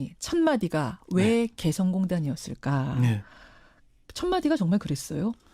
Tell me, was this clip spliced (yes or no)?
no